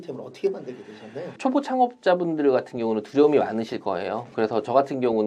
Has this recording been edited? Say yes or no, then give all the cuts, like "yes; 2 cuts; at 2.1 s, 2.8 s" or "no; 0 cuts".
yes; 1 cut; at 1.3 s